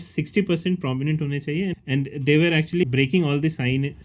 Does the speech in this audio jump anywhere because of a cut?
yes; 2 cuts; at 1.8 s, 2.8 s

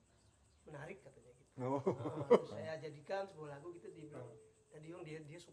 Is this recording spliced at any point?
no; 0 cuts

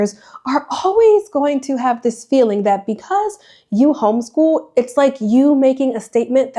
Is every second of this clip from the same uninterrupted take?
yes; 0 cuts

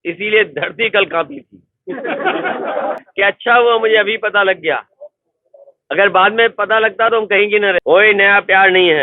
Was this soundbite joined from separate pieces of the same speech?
yes; 2 cuts; at 3.0 s, 7.8 s

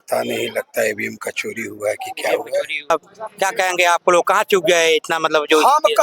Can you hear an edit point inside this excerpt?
yes; 1 cut; at 2.9 s

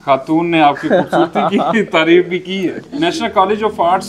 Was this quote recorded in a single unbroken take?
no; 1 cut; at 2.8 s

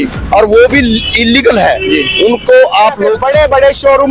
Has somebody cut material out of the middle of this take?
yes; 1 cut; at 3.1 s

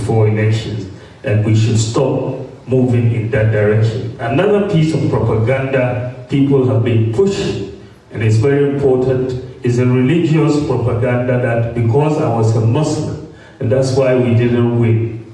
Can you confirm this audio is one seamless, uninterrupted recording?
yes; 0 cuts

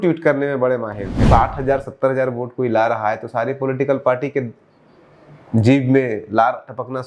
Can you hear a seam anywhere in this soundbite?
yes; 1 cut; at 1.2 s

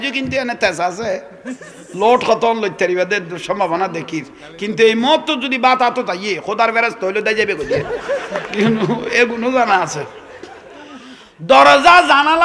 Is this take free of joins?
no; 1 cut; at 11.5 s

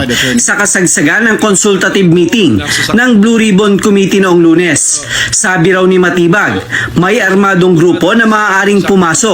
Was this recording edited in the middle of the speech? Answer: no; 0 cuts

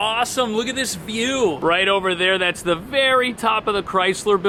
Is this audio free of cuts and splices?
yes; 0 cuts

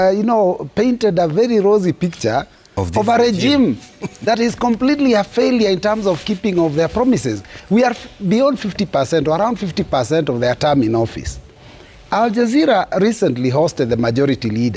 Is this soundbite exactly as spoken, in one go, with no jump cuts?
yes; 0 cuts

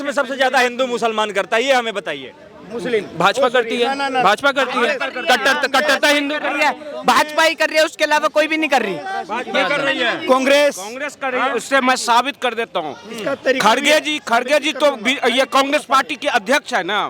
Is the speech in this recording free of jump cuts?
yes; 0 cuts

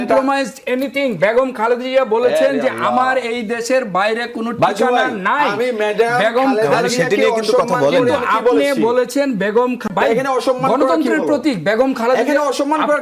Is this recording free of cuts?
no; 1 cut; at 9.9 s

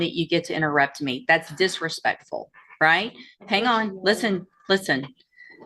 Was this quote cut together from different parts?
no; 0 cuts

